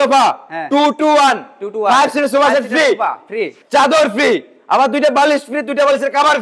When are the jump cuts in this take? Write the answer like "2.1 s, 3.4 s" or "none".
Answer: 3.6 s